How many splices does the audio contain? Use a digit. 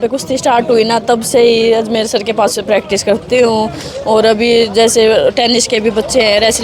0